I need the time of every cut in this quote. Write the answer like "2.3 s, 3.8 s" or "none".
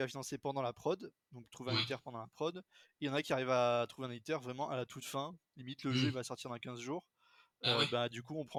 none